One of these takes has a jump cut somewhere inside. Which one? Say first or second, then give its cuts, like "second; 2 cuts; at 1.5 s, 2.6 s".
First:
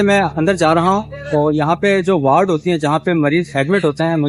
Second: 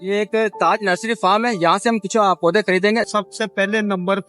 second; 1 cut; at 3.1 s